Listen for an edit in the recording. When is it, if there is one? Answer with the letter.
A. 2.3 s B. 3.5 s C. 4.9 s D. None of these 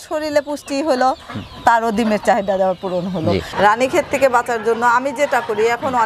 B